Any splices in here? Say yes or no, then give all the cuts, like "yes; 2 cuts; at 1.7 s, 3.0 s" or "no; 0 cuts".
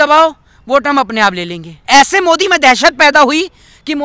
yes; 1 cut; at 1.8 s